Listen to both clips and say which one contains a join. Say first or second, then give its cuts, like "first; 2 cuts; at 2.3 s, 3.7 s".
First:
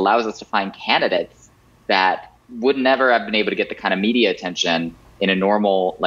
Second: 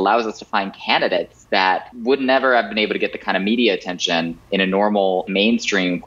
second; 3 cuts; at 1.7 s, 4.4 s, 5.3 s